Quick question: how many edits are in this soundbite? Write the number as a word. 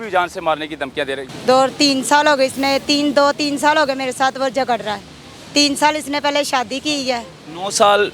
one